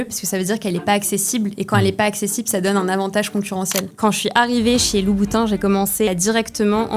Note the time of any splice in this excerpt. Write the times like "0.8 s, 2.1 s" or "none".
3.9 s, 6.1 s